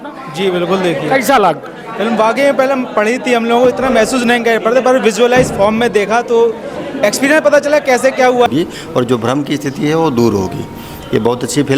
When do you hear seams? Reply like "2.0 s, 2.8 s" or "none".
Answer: 8.5 s